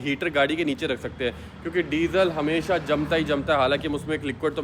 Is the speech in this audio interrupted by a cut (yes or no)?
no